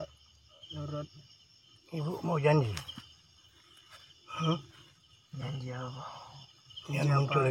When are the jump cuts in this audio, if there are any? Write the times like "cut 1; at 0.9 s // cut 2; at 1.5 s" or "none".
none